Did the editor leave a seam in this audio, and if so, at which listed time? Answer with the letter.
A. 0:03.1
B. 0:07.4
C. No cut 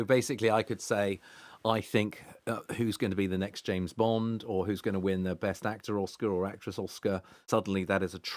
B